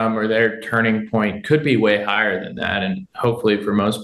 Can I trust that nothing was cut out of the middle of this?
yes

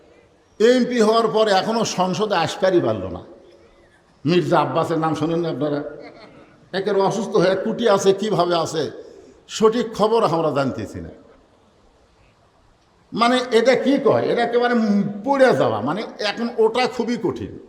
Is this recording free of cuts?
yes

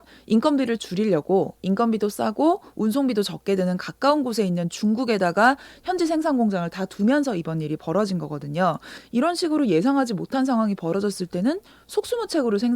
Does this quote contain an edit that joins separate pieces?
yes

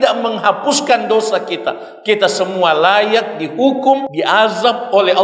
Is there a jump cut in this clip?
yes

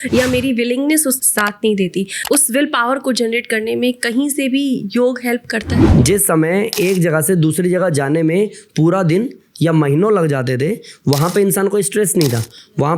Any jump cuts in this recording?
yes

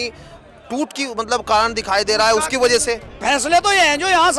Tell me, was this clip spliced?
yes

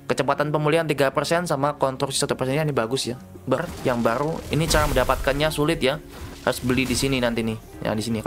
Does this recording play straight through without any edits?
no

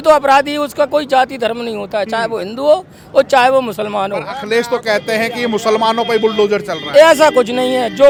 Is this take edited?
no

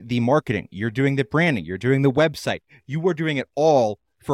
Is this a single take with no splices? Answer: yes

